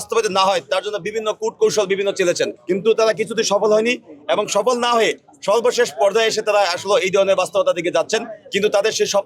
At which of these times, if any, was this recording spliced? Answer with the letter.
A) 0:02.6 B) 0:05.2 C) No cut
A